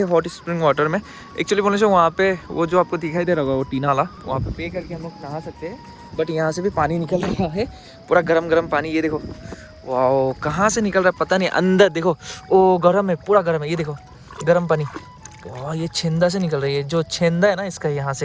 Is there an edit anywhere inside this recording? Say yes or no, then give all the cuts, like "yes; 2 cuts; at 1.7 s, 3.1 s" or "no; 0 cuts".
no; 0 cuts